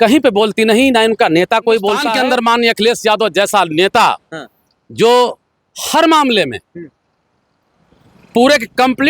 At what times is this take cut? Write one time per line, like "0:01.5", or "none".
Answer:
0:02.1